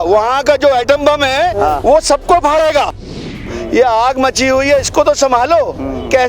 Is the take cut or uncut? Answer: cut